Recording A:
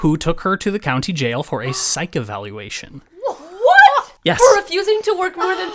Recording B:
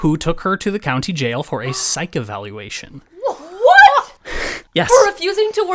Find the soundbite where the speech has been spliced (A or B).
A